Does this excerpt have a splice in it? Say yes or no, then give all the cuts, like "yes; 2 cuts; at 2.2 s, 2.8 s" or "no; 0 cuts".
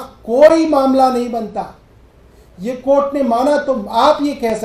no; 0 cuts